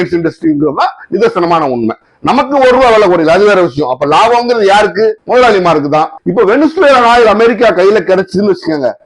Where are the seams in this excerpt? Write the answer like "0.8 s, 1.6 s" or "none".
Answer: 6.2 s